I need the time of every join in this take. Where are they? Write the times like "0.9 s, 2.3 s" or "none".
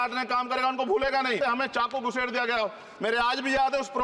1.4 s